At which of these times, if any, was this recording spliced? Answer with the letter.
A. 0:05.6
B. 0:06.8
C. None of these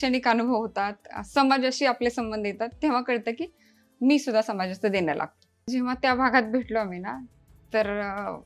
A